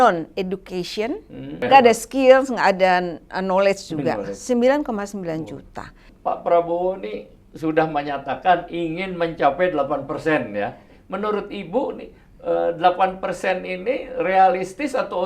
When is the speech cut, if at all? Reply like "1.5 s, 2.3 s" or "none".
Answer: 1.6 s, 6.1 s, 10.9 s